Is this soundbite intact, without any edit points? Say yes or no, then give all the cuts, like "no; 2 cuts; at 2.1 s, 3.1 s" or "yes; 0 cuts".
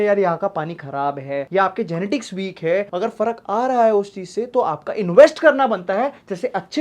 yes; 0 cuts